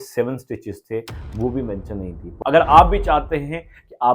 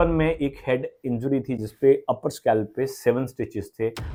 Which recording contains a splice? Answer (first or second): first